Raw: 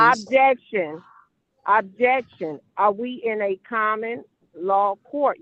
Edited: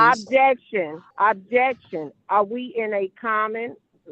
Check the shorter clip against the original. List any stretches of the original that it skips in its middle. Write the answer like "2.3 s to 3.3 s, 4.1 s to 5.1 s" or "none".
1.0 s to 1.5 s